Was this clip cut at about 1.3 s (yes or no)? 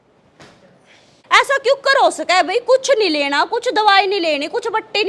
yes